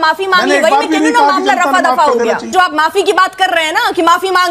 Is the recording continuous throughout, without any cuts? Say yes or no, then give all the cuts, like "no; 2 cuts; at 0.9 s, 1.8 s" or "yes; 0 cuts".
no; 1 cut; at 2.5 s